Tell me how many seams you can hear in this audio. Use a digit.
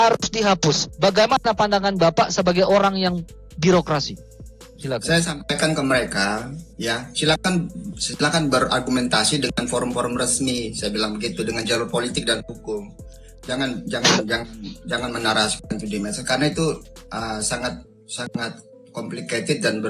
0